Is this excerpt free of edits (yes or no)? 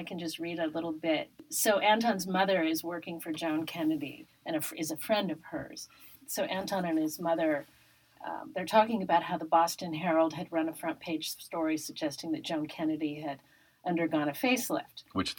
no